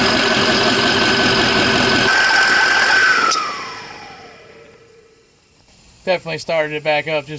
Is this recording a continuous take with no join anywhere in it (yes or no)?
no